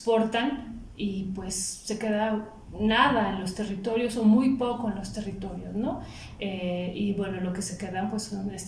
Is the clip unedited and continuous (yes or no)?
yes